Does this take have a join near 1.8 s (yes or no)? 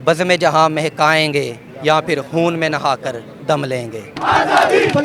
no